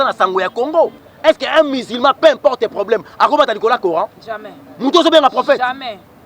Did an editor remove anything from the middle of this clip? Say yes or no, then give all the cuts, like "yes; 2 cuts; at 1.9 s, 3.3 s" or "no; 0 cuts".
yes; 1 cut; at 1.1 s